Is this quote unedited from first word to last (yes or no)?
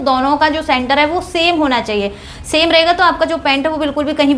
yes